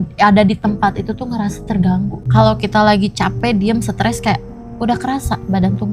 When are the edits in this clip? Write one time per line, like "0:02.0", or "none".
0:02.2